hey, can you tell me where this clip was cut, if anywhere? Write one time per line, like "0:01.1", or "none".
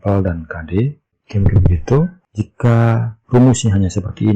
0:01.2
0:02.2